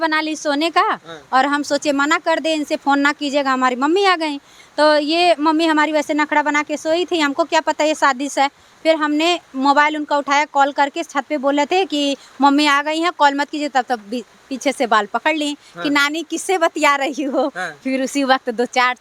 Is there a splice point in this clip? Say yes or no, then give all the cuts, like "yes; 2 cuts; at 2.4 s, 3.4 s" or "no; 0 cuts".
no; 0 cuts